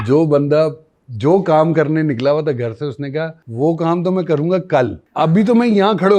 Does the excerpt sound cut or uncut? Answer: cut